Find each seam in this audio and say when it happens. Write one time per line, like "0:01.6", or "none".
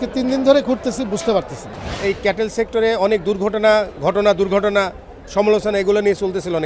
0:02.0